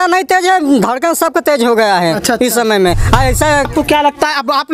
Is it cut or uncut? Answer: cut